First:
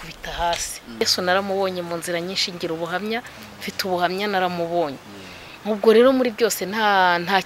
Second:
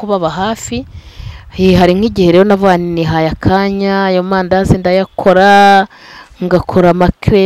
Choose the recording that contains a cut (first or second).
first